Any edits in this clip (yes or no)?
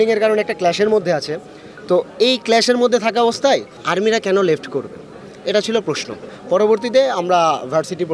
no